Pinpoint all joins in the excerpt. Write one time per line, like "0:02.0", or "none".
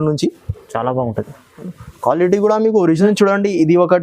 0:03.0